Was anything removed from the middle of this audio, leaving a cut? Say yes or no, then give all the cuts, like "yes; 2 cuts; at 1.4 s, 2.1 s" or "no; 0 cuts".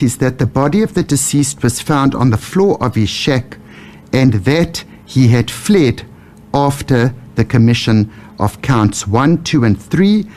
no; 0 cuts